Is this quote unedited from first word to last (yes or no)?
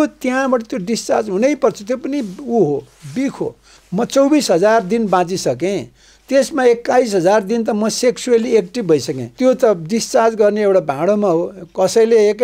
no